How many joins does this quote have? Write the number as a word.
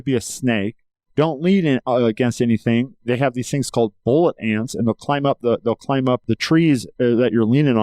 one